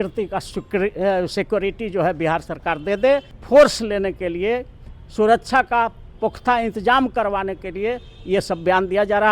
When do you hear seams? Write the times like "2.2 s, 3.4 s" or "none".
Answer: 3.3 s